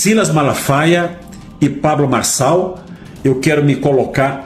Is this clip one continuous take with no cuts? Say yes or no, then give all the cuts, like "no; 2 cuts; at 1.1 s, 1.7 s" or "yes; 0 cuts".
yes; 0 cuts